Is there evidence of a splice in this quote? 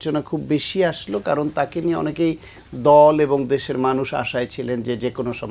no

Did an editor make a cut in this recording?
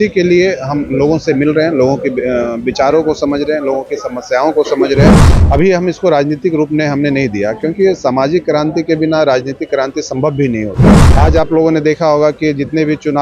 yes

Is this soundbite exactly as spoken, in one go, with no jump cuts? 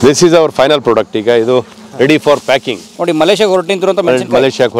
no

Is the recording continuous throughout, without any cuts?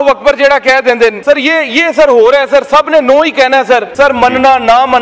no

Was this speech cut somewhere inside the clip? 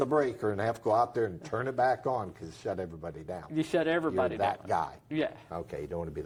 no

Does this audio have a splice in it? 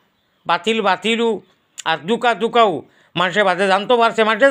no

